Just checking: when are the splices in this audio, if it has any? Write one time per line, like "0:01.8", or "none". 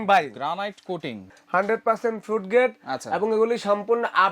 0:01.2